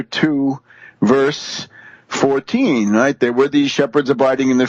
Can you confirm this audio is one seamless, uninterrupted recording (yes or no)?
no